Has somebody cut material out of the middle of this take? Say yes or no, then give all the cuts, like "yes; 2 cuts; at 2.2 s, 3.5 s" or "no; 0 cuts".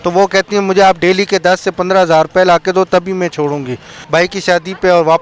yes; 1 cut; at 3.9 s